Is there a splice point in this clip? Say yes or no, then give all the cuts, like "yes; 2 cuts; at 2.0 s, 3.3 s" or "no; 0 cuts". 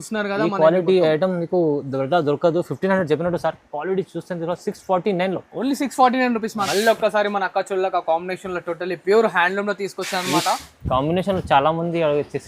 yes; 1 cut; at 6.6 s